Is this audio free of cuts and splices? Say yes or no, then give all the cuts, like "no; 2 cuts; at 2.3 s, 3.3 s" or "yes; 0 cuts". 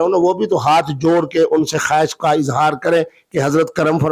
yes; 0 cuts